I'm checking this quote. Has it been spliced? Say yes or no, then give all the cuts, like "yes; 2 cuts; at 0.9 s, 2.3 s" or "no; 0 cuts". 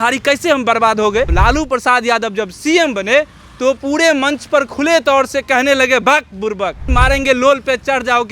yes; 2 cuts; at 1.3 s, 6.9 s